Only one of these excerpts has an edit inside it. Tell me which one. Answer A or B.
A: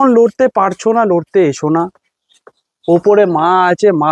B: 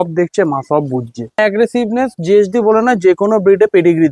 B